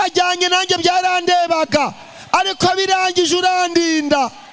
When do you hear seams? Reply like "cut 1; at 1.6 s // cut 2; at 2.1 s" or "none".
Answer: none